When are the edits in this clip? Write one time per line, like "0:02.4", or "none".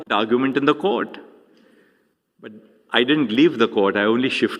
0:01.6